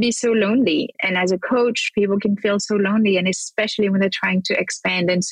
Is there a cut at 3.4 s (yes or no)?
no